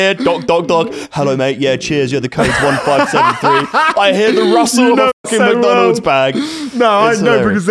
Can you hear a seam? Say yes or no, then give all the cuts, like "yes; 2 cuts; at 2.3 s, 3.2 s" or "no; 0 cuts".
no; 0 cuts